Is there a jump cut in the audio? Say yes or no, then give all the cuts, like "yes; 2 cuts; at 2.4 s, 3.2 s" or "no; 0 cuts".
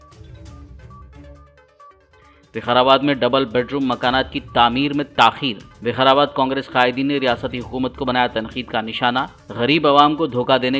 no; 0 cuts